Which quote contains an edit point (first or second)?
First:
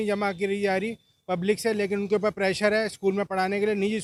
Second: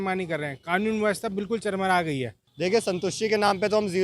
second